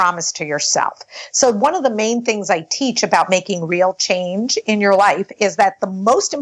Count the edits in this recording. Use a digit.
0